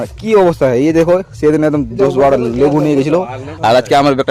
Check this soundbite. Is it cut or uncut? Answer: uncut